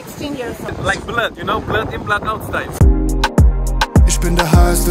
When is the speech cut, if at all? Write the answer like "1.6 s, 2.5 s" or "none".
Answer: 0.7 s, 2.7 s